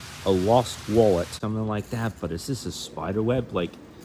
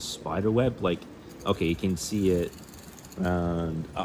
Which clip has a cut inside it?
first; 1 cut; at 1.4 s

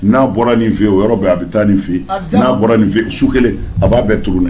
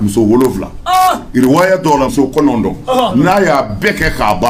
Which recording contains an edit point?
second; 1 cut; at 2.1 s

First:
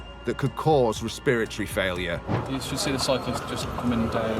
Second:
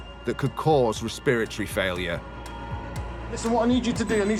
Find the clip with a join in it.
first; 1 cut; at 2.4 s

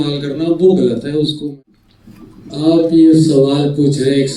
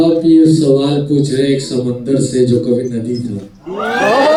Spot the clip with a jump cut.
first; 1 cut; at 1.4 s

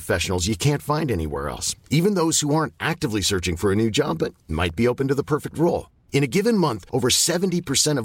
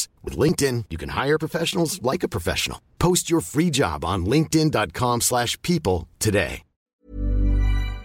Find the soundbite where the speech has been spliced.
second; 1 cut; at 6.8 s

